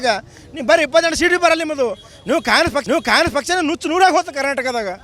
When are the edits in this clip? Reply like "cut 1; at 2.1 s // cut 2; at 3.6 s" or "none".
none